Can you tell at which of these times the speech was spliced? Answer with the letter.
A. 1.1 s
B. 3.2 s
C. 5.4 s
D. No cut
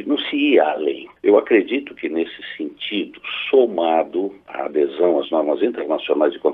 A